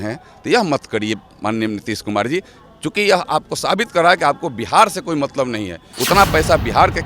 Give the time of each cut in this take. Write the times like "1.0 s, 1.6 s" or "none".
5.9 s